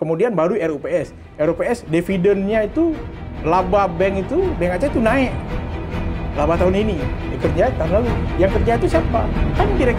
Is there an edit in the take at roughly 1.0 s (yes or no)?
no